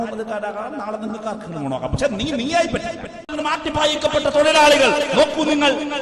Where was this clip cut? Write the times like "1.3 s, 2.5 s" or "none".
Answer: 3.3 s